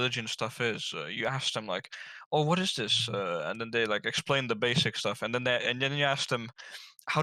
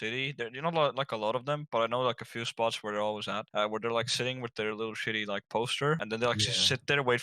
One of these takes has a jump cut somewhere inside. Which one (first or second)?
second